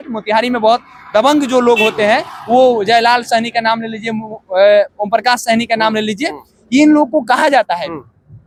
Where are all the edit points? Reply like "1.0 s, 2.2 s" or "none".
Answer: none